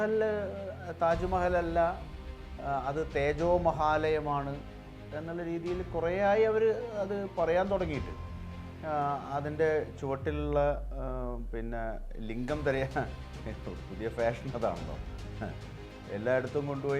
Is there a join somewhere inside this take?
no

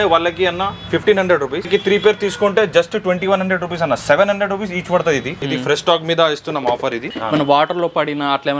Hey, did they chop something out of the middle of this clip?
yes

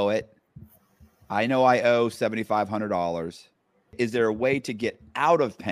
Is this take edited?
yes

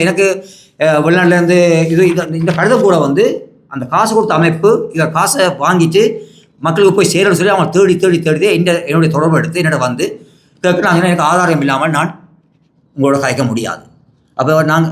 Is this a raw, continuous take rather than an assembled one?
yes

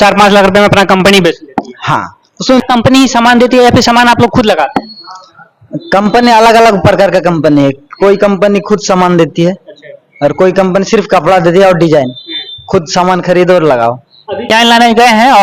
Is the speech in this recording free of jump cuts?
no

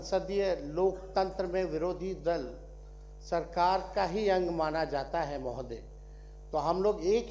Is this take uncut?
yes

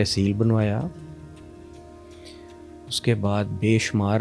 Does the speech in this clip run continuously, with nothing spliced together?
yes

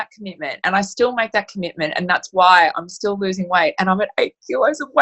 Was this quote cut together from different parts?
no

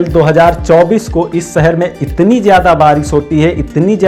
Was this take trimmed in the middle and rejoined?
no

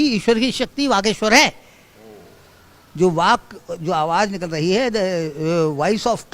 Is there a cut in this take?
no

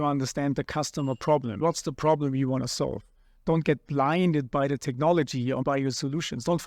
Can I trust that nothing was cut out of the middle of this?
yes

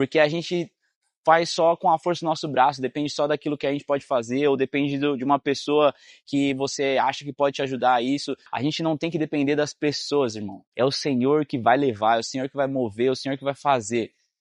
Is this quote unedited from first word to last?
no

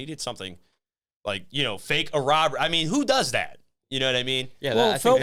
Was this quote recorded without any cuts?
yes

